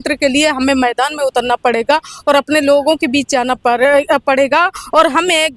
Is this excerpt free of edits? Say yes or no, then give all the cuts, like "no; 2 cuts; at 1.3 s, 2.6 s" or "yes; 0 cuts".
yes; 0 cuts